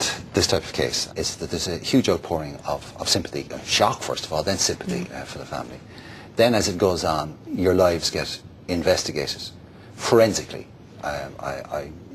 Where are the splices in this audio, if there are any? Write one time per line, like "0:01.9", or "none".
0:01.0

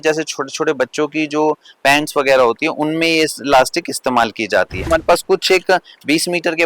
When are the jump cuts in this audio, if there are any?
0:04.9

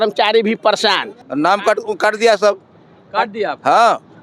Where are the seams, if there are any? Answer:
0:01.2

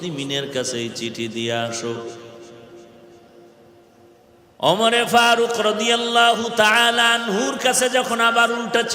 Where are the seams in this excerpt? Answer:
none

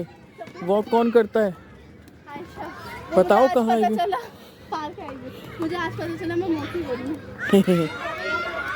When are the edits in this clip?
none

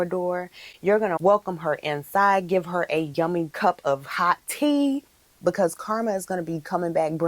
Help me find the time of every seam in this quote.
0:01.2
0:03.3
0:05.1

